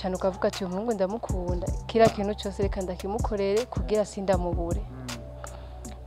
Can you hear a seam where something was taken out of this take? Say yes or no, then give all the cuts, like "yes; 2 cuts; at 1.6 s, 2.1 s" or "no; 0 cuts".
no; 0 cuts